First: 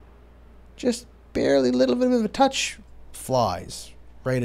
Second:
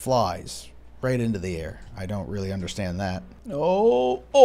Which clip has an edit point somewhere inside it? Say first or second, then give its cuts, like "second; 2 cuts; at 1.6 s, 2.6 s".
second; 1 cut; at 3.3 s